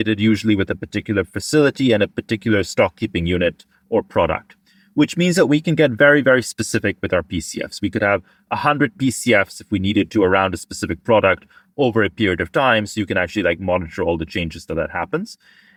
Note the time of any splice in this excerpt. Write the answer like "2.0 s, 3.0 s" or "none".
none